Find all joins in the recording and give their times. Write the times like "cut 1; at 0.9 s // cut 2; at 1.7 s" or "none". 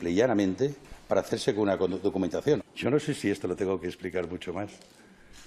cut 1; at 2.6 s